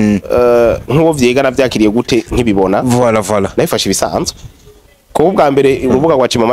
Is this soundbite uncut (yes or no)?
yes